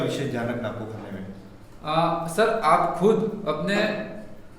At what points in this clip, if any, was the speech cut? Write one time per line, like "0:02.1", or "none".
none